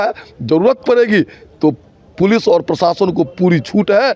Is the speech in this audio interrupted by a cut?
no; 0 cuts

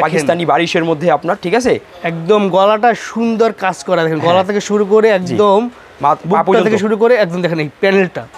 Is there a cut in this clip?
no; 0 cuts

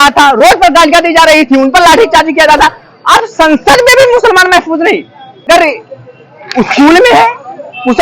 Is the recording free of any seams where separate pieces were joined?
no; 1 cut; at 5.5 s

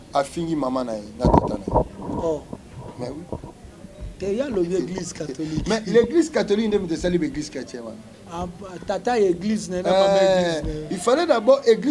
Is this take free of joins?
yes; 0 cuts

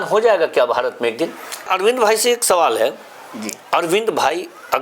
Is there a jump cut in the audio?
yes; 1 cut; at 1.7 s

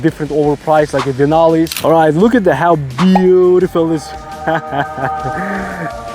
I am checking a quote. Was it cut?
yes; 1 cut; at 1.8 s

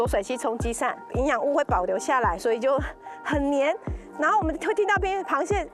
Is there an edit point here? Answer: yes; 1 cut; at 1.1 s

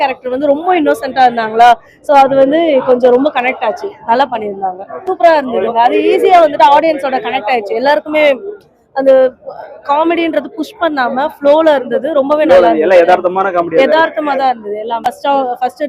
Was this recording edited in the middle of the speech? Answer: yes; 2 cuts; at 4.9 s, 15.0 s

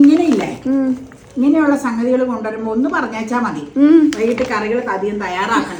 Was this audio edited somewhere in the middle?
no; 0 cuts

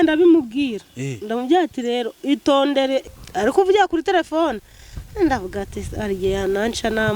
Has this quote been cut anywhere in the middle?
yes; 1 cut; at 3.2 s

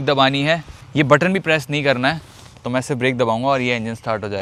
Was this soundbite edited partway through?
no; 0 cuts

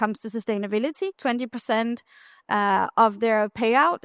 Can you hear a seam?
yes; 1 cut; at 1.2 s

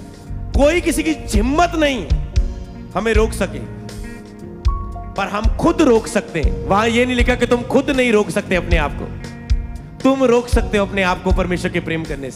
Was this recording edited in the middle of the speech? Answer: no; 0 cuts

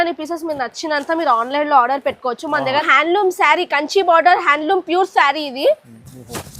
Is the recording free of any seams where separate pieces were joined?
no; 1 cut; at 2.9 s

